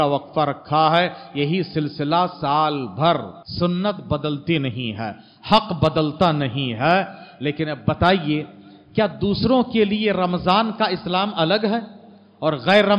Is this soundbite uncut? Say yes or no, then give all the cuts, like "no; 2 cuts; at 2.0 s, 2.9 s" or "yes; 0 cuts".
no; 1 cut; at 3.4 s